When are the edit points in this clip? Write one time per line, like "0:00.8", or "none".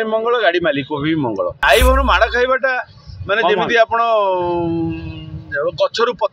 0:01.6